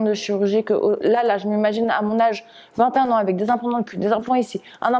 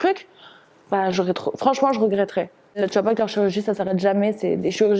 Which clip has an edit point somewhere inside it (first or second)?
second